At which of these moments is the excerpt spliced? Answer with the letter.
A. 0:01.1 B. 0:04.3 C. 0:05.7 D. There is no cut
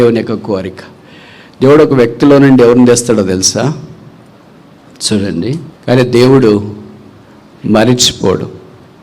C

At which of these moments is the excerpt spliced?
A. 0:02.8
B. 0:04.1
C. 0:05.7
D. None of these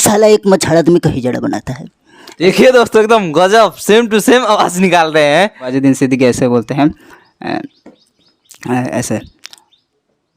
C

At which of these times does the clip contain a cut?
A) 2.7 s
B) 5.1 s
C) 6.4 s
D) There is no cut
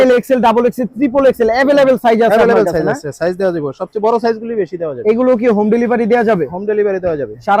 D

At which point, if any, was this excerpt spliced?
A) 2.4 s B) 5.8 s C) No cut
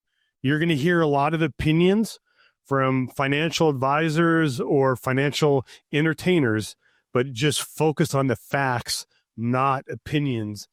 C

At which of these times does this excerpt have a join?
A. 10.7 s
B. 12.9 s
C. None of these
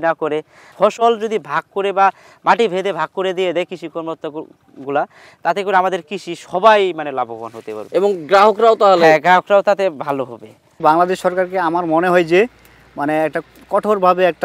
A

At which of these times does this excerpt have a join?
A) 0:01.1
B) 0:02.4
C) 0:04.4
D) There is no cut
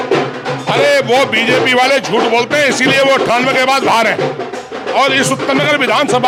D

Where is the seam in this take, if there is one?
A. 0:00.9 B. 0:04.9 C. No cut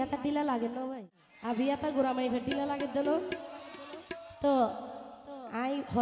A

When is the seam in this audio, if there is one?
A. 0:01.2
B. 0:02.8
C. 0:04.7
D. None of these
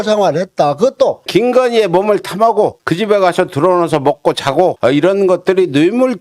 A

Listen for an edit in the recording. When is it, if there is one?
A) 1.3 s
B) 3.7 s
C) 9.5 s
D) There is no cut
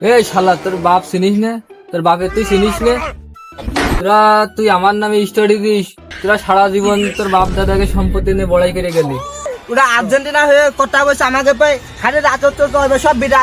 C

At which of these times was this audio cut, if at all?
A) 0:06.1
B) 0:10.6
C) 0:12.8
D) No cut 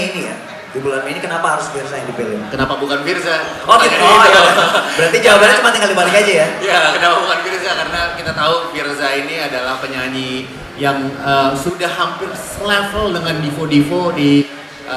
D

